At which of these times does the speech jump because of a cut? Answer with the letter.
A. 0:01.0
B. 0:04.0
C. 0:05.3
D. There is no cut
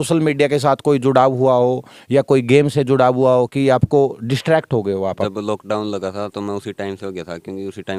C